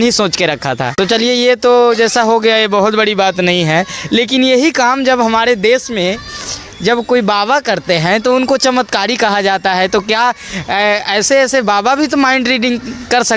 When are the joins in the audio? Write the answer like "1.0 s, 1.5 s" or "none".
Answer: none